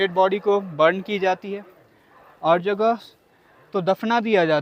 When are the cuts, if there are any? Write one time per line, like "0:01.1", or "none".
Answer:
none